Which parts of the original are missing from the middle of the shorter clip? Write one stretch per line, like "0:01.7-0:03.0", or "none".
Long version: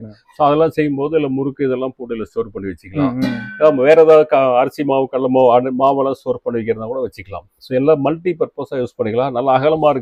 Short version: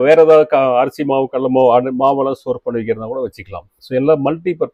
none